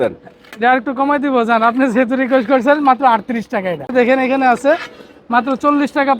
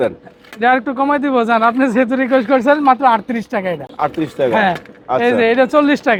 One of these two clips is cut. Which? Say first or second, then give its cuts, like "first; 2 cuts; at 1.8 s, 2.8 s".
first; 1 cut; at 3.9 s